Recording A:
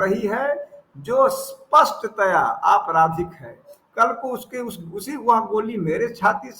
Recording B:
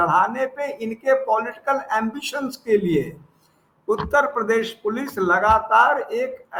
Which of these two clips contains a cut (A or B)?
A